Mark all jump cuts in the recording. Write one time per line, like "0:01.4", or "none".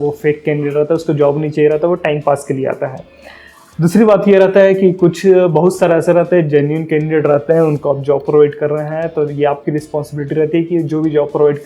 none